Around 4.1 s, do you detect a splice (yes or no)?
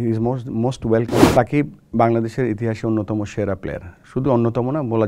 no